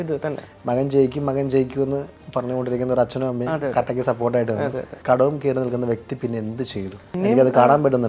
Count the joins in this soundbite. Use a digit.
1